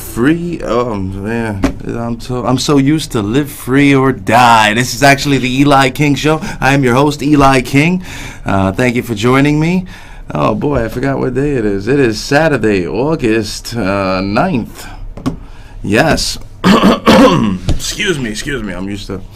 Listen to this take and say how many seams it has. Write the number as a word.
one